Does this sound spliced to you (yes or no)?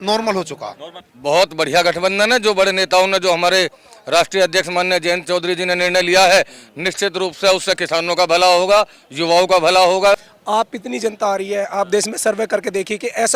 yes